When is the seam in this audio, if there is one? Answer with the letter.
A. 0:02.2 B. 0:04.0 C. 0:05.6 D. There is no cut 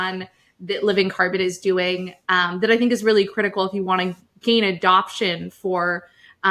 D